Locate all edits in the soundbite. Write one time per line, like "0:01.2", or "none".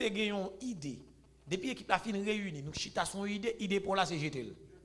none